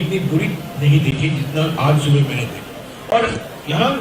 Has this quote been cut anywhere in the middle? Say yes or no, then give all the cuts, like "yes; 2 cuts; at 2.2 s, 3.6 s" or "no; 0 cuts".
yes; 1 cut; at 2.9 s